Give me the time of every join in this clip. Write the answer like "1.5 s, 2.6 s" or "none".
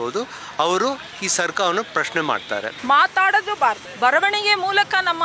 2.7 s, 3.9 s